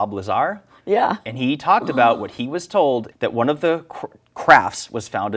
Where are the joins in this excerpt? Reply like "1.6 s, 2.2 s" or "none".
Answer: 3.1 s